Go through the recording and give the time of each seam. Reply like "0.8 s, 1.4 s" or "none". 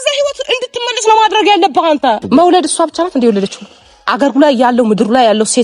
2.2 s